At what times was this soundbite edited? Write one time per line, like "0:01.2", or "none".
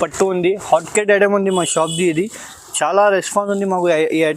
none